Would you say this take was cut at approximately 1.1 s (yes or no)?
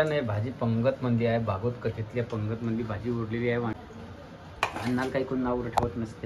no